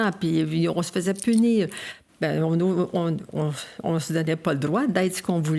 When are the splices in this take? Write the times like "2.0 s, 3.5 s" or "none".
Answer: none